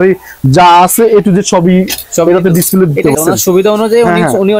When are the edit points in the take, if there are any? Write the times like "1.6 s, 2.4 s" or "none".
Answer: 3.1 s